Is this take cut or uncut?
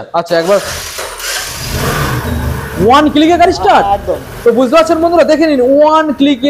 uncut